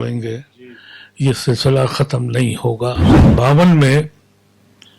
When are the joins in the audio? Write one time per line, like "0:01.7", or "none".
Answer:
0:03.1

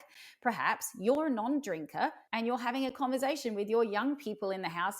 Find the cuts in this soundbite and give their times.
0:02.2

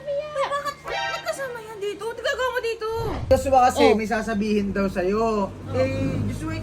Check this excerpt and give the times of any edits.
0:03.2

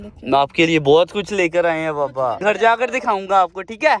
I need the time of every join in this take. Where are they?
none

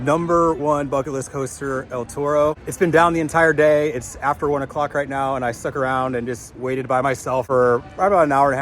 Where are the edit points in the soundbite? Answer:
0:02.7
0:07.5

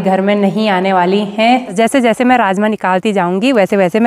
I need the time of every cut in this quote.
0:01.7

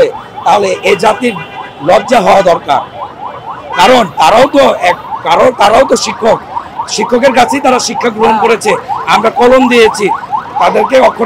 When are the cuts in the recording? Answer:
none

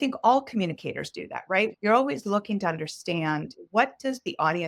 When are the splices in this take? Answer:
0:01.7
0:03.5

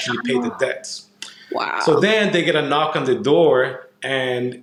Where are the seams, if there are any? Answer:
none

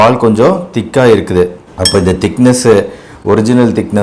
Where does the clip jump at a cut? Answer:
none

